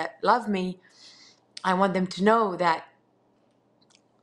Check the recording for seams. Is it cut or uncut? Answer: uncut